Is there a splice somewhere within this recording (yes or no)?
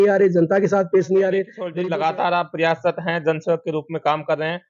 yes